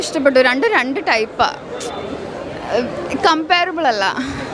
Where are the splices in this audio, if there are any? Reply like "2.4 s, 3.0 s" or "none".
none